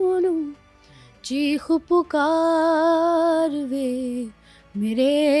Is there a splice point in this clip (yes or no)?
no